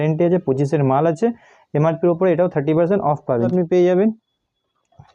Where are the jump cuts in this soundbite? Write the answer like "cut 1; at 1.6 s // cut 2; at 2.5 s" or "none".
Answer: cut 1; at 3.5 s